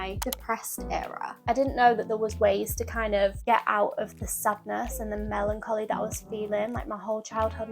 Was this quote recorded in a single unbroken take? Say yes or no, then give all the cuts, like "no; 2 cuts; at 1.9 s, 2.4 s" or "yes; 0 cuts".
no; 1 cut; at 1.4 s